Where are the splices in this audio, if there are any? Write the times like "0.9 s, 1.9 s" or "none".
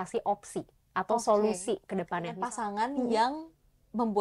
2.4 s